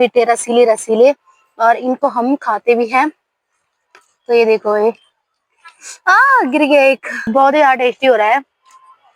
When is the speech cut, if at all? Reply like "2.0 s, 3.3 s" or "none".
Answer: none